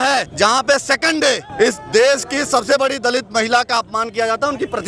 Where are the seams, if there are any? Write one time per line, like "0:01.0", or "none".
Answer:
none